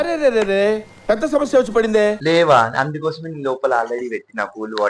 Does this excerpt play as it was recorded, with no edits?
yes; 0 cuts

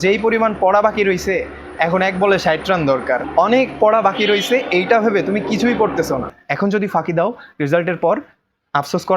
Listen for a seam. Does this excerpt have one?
yes; 2 cuts; at 3.3 s, 6.4 s

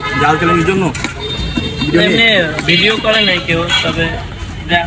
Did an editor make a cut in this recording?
no; 0 cuts

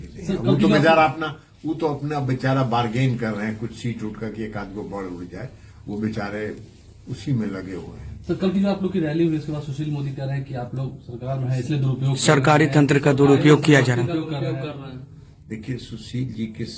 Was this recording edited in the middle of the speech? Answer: no; 0 cuts

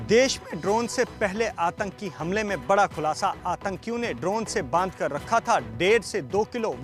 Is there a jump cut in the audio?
no; 0 cuts

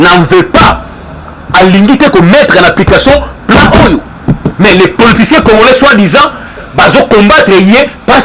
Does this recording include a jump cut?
no; 0 cuts

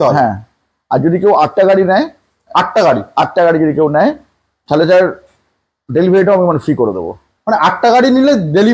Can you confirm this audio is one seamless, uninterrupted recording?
yes; 0 cuts

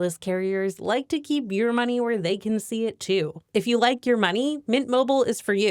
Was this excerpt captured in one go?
no; 1 cut; at 3.4 s

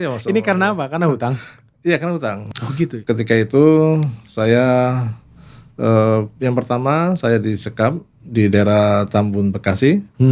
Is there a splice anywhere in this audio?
yes; 1 cut; at 2.9 s

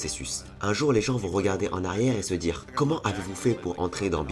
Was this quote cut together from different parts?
yes; 1 cut; at 2.6 s

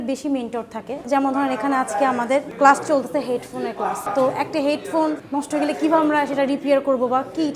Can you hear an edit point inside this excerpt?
yes; 4 cuts; at 1.0 s, 2.5 s, 4.0 s, 5.2 s

